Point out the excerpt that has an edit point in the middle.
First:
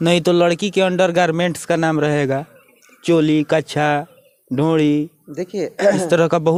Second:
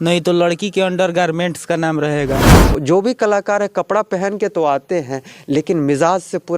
second; 1 cut; at 2.7 s

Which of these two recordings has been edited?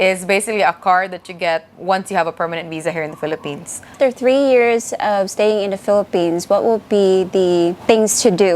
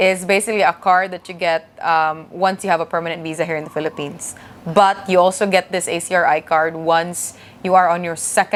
first; 2 cuts; at 1.7 s, 3.8 s

